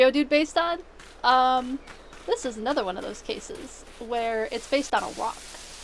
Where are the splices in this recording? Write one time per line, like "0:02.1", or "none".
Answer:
none